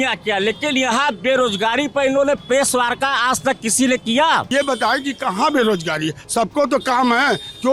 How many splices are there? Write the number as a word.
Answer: one